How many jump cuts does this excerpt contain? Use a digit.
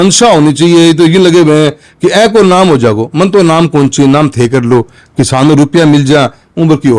0